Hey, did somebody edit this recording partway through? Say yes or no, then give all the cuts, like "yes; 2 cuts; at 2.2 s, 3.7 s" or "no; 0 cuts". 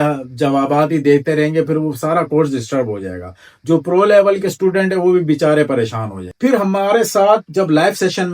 yes; 1 cut; at 6.3 s